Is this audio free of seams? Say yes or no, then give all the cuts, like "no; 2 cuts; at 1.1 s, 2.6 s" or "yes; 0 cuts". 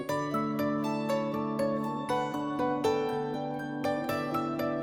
yes; 0 cuts